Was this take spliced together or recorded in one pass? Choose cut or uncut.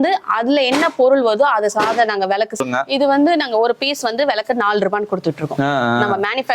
cut